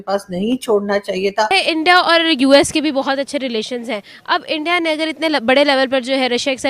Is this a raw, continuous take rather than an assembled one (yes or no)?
no